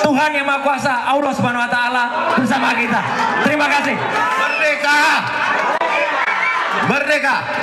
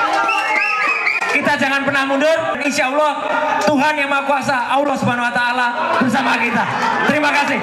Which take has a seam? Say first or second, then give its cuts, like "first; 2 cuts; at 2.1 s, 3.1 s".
second; 1 cut; at 2.5 s